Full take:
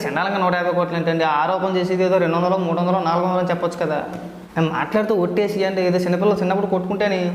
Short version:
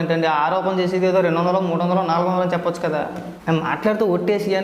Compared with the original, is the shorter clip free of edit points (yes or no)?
no